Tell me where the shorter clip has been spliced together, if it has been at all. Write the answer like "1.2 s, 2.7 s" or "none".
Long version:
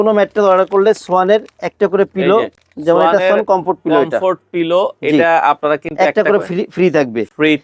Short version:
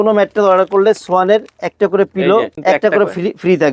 2.5 s